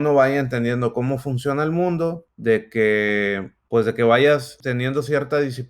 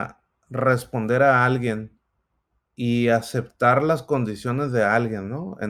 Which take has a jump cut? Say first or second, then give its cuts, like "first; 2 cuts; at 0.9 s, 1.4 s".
first; 3 cuts; at 2.3 s, 3.5 s, 4.6 s